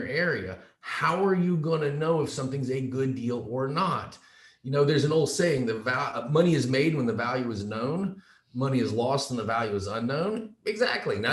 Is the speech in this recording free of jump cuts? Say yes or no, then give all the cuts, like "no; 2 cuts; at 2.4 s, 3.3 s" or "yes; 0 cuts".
yes; 0 cuts